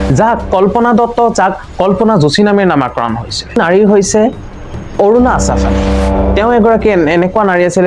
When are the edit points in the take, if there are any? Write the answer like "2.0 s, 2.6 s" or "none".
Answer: 3.6 s